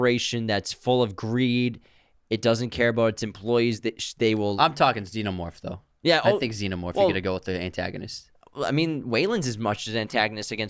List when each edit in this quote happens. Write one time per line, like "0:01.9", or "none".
none